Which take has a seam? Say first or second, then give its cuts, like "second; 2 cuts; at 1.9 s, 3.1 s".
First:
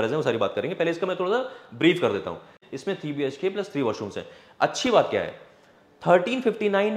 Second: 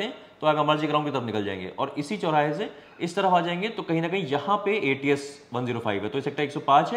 first; 1 cut; at 2.6 s